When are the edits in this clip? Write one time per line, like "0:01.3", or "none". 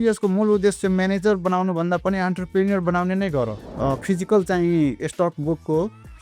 0:03.6